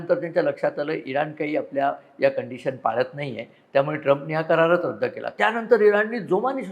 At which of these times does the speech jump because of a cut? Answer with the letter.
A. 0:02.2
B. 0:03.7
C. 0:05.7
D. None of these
D